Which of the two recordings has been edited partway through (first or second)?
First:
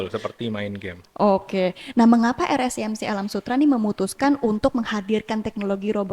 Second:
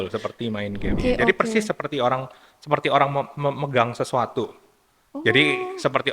second